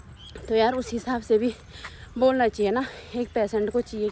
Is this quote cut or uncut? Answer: uncut